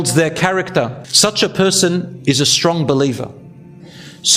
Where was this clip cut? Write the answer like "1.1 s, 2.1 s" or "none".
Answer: 1.0 s, 3.6 s